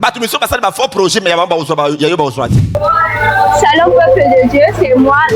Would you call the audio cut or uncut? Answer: cut